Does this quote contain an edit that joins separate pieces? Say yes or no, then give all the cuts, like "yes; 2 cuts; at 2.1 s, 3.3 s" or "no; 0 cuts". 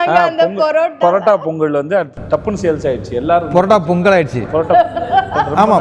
no; 0 cuts